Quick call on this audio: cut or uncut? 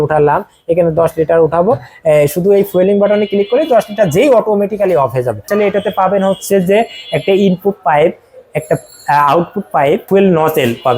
cut